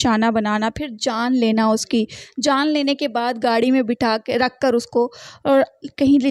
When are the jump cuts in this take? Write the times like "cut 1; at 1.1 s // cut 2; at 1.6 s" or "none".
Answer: none